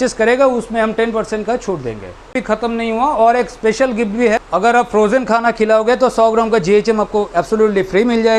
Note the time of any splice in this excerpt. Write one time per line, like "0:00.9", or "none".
0:02.2
0:04.5